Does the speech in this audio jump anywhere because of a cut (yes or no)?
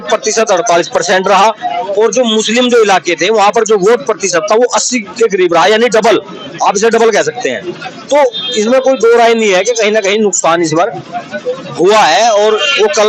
no